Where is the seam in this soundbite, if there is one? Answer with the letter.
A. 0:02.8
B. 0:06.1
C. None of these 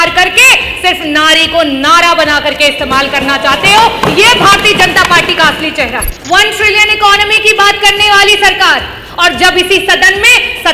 B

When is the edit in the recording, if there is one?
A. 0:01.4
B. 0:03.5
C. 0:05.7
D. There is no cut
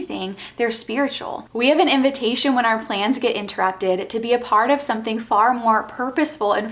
A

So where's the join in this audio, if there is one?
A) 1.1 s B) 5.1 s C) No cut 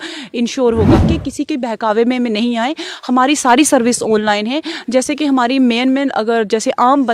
A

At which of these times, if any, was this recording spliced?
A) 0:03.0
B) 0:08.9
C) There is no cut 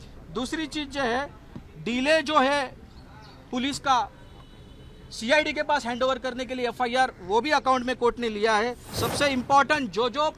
B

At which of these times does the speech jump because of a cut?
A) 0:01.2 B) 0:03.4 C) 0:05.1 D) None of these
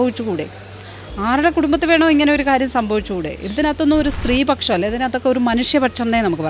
B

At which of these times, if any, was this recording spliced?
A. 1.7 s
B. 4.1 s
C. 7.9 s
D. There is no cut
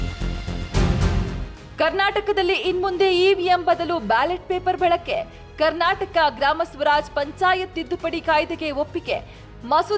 A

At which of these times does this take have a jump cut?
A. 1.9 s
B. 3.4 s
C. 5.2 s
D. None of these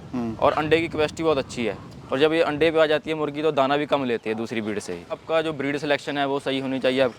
C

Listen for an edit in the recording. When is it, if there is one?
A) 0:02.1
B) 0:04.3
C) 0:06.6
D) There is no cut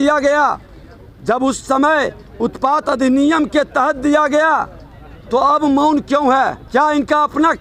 C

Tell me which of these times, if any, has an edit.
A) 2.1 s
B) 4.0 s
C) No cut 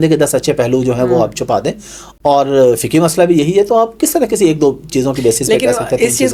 C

